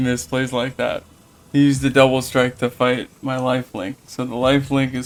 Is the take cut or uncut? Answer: uncut